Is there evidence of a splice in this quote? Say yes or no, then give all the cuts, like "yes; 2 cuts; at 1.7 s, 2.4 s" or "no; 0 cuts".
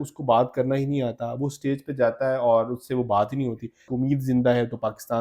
yes; 1 cut; at 3.9 s